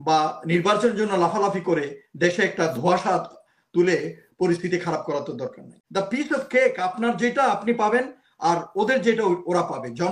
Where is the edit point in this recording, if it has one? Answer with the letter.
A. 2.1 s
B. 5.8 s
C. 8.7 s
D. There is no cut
B